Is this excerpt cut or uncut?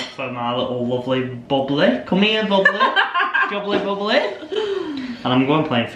uncut